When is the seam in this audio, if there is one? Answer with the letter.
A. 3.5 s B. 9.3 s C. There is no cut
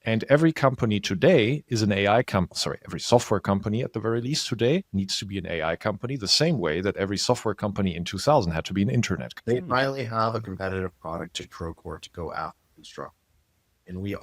B